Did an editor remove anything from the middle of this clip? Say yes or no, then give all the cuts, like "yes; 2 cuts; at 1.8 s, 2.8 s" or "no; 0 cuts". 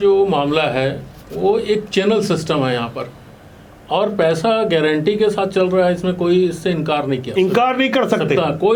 no; 0 cuts